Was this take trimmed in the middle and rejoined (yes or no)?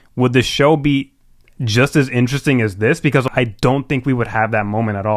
yes